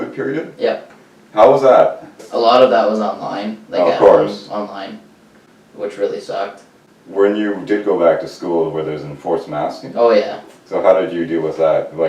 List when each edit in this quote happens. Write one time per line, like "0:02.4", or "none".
0:02.2